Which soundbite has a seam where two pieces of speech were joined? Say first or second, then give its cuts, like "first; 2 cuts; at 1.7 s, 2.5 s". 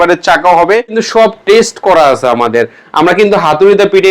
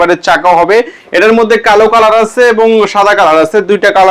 first; 1 cut; at 1.0 s